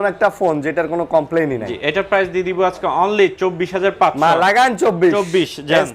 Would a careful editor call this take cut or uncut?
uncut